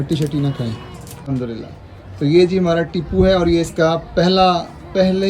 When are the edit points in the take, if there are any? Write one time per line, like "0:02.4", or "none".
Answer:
0:01.3